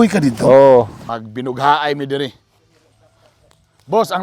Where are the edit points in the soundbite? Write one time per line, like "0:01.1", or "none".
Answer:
0:01.1